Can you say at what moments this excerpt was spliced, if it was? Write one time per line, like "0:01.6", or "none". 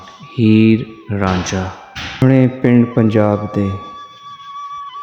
0:02.2